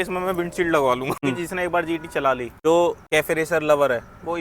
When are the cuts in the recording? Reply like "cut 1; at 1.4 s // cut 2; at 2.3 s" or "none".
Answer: cut 1; at 1.2 s // cut 2; at 2.5 s // cut 3; at 3.0 s